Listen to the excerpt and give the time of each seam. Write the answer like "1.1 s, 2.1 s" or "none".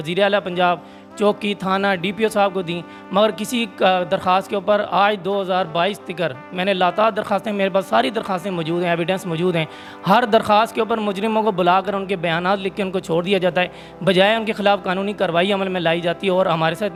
none